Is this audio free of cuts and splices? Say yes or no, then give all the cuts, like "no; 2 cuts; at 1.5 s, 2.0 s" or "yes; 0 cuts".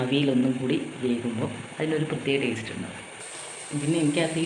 no; 1 cut; at 3.0 s